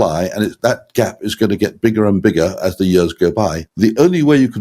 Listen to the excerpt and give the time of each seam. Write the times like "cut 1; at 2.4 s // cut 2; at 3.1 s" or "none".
cut 1; at 3.6 s